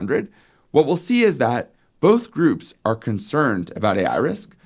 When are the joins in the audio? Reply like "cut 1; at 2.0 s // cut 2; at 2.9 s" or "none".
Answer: none